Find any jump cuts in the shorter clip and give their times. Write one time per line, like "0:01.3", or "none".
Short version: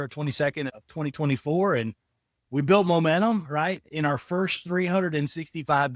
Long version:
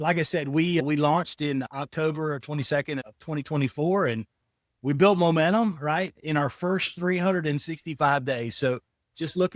none

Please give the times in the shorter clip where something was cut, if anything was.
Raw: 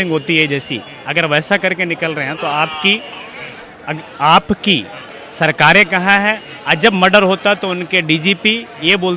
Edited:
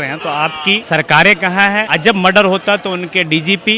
0:00.8
0:01.9

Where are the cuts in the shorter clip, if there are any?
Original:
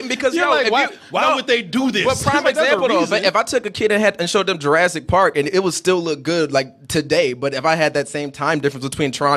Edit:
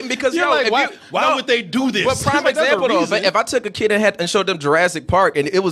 none

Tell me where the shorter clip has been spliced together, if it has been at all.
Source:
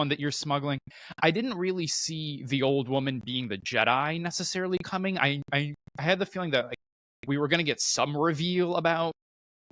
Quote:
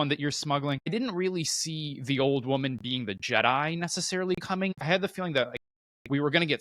0:00.9
0:04.7

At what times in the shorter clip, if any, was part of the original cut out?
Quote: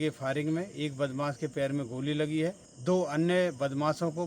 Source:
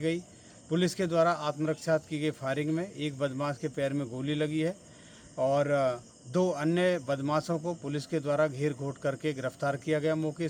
0:02.7

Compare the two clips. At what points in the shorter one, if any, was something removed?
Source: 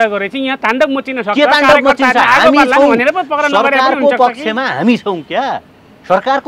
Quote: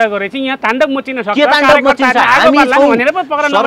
none

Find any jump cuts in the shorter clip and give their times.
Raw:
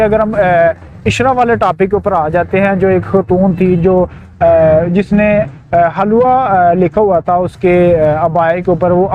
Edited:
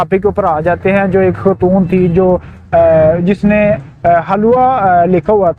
none

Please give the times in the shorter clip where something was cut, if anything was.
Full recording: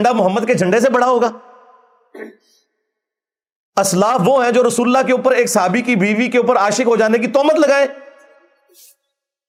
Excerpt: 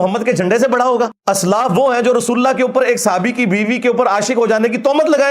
0:01.2

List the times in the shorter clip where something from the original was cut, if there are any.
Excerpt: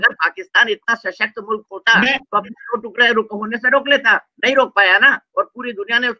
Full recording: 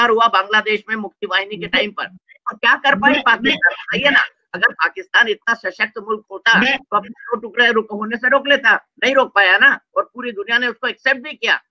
none

